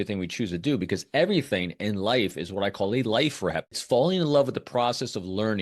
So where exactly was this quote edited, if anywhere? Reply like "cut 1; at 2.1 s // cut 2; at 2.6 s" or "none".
cut 1; at 3.8 s

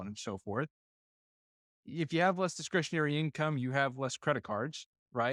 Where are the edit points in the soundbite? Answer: none

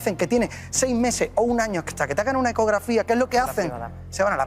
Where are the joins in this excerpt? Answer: none

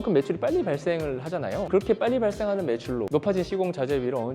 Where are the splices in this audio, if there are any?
cut 1; at 1.7 s // cut 2; at 3.1 s

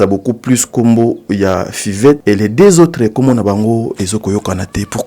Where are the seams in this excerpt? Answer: cut 1; at 2.2 s

